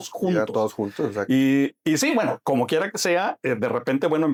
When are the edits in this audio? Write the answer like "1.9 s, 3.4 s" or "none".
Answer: none